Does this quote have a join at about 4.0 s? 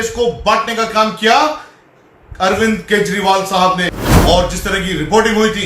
yes; 1 cut; at 4.0 s

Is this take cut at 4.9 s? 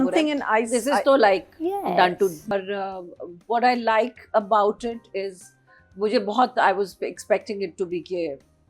no; 1 cut; at 2.5 s

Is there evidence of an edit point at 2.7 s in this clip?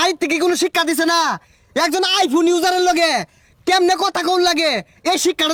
no; 0 cuts

